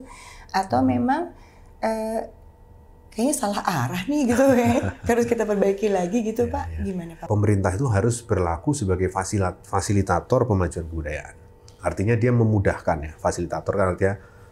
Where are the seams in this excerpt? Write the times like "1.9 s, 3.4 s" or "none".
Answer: 7.3 s